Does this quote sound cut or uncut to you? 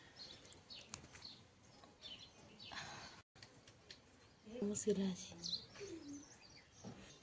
uncut